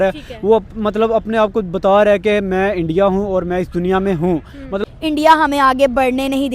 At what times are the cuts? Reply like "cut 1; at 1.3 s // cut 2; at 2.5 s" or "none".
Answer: cut 1; at 4.8 s